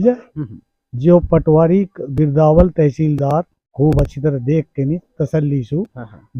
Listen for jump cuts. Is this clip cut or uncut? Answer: cut